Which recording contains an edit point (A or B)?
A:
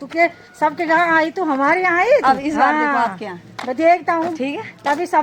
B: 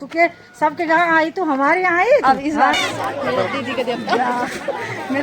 B